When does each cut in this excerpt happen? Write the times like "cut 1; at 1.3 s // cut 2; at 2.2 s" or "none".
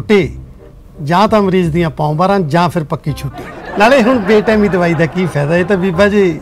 cut 1; at 3.6 s